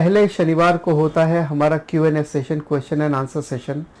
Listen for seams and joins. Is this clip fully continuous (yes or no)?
yes